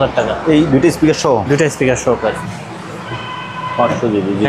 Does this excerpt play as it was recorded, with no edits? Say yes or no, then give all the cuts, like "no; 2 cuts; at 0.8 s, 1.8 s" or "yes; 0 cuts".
no; 1 cut; at 2.2 s